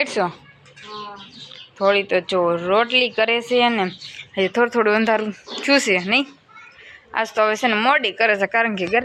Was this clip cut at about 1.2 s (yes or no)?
no